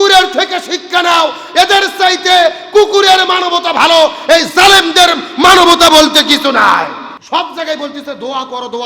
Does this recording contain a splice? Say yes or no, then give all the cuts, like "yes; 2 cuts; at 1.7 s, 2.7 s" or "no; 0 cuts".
yes; 1 cut; at 7.1 s